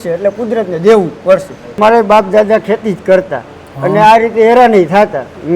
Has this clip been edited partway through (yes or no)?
yes